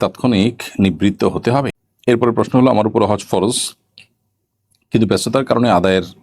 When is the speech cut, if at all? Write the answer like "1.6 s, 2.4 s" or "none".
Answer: 1.8 s